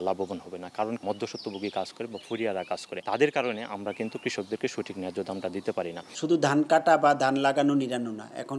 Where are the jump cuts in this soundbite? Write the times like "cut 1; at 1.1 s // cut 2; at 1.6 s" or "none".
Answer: cut 1; at 1.0 s // cut 2; at 2.9 s // cut 3; at 6.0 s